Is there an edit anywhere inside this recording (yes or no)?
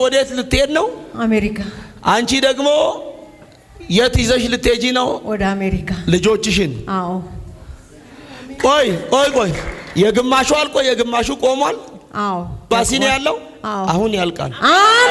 no